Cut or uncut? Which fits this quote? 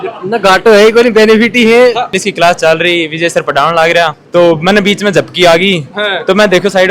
cut